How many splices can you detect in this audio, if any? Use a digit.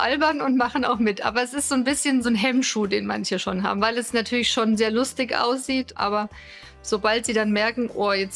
2